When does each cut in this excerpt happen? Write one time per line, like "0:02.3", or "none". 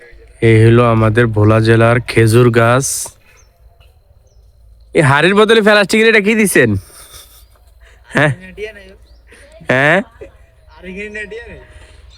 none

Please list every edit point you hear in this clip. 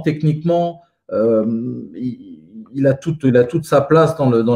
none

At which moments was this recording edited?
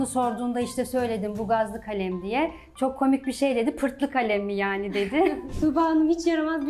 0:05.5

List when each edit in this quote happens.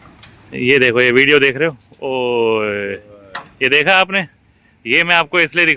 none

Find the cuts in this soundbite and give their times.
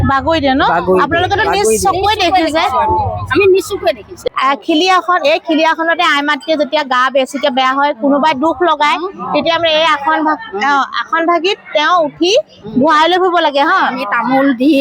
0:04.1

